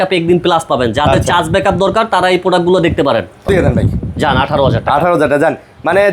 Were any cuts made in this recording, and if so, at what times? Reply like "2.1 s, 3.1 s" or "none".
3.5 s